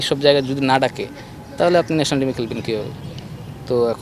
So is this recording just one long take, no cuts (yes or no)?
yes